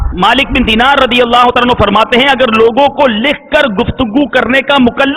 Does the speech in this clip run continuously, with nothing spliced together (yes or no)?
yes